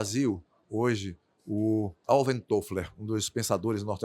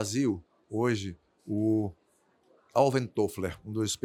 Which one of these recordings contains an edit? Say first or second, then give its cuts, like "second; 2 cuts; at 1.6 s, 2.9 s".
first; 1 cut; at 2.0 s